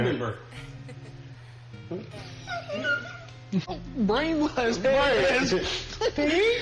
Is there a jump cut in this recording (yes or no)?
yes